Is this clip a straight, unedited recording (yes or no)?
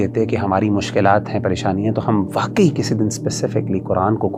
yes